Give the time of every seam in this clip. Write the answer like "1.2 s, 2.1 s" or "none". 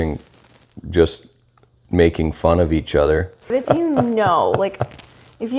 3.5 s